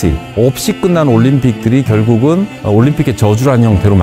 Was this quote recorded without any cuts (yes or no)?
yes